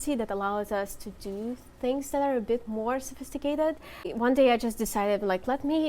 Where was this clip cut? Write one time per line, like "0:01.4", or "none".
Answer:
0:04.1